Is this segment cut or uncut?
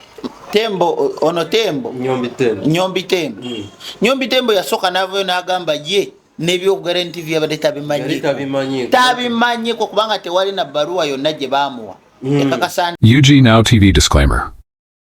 cut